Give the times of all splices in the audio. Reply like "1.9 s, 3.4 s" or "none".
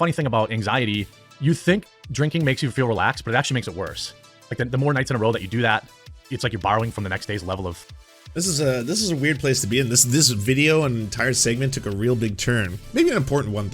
1.2 s